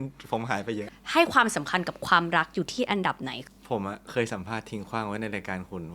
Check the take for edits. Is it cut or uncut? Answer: cut